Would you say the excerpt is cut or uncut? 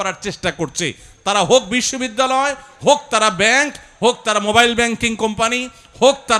uncut